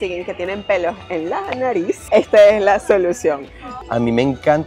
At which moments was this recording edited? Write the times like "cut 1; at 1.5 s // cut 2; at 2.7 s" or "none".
cut 1; at 2.0 s // cut 2; at 3.7 s